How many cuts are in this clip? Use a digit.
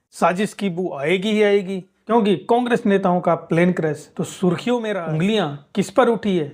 1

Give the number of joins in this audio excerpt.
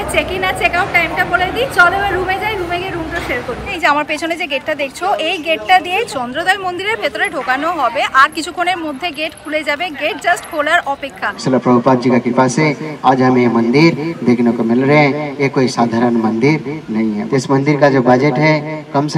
3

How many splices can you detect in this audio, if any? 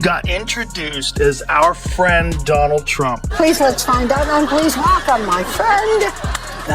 1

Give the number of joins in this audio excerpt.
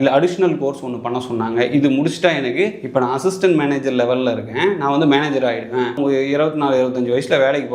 1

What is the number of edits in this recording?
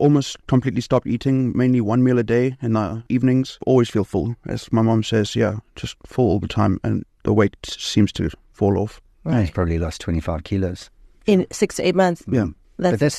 1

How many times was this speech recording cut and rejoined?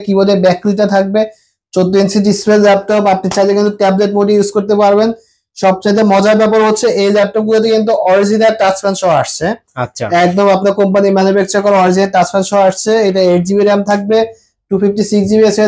0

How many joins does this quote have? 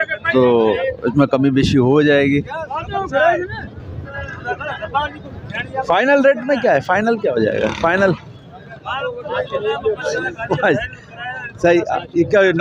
0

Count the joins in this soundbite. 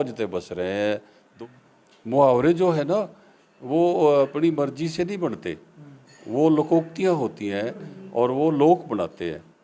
1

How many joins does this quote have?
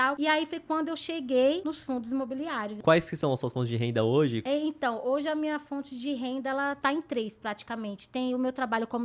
1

